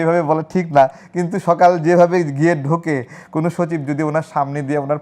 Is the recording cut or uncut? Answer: uncut